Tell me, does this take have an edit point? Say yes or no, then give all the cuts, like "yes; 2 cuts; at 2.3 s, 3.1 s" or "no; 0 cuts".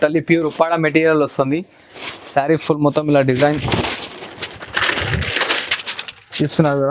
no; 0 cuts